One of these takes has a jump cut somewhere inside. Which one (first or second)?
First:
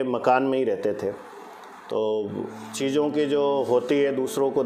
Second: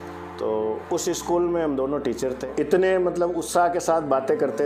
second